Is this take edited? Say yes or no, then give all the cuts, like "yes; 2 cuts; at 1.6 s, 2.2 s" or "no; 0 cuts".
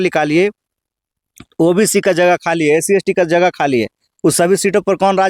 no; 0 cuts